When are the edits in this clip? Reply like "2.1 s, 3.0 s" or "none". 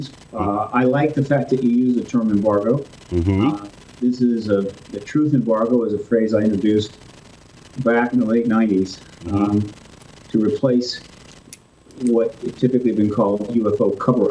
8.1 s